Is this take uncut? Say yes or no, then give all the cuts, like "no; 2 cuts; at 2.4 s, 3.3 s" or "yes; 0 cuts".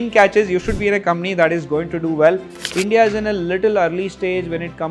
no; 1 cut; at 2.6 s